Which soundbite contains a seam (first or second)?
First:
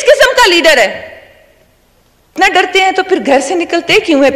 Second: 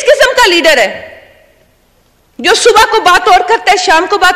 first